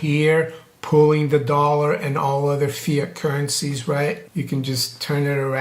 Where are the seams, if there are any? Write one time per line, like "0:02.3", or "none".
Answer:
0:04.2

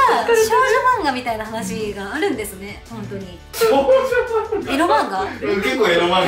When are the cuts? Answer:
0:03.5

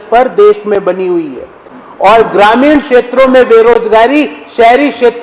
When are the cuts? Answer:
none

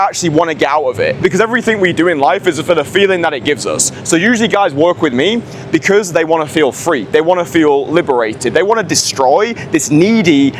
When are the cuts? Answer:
0:01.2

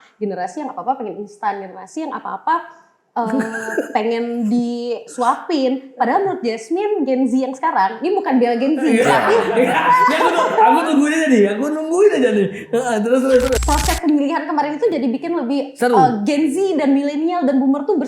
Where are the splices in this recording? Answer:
0:13.5

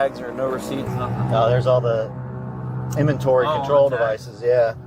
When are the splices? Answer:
none

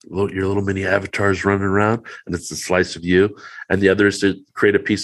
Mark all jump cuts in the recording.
none

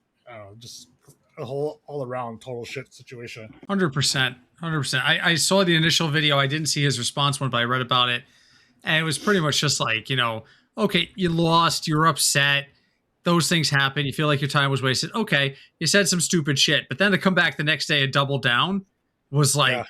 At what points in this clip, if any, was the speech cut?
0:03.5

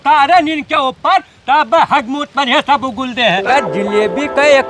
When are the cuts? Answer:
0:03.4

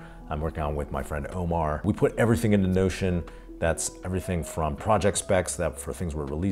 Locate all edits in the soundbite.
0:01.8

